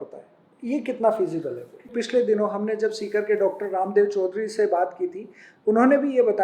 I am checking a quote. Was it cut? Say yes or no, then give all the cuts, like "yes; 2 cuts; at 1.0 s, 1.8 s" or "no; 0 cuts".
yes; 1 cut; at 1.9 s